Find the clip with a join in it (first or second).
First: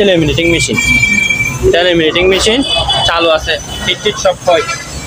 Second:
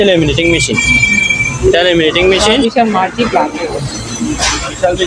second